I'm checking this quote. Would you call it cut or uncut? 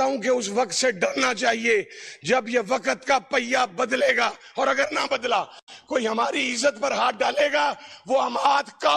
uncut